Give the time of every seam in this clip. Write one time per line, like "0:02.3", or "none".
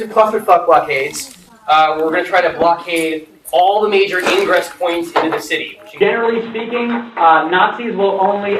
0:05.8